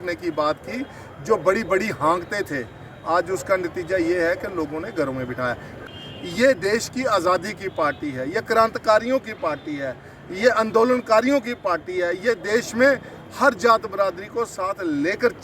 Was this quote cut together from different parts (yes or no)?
yes